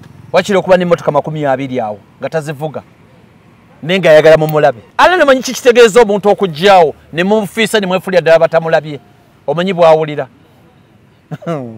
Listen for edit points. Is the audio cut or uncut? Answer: cut